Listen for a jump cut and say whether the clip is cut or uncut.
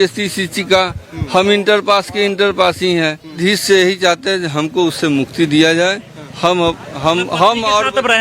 cut